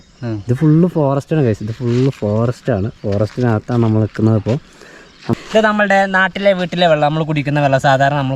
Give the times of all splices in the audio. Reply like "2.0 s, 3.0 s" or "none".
5.3 s